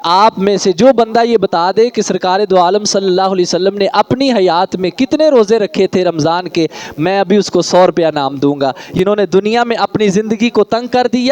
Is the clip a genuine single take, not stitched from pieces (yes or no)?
no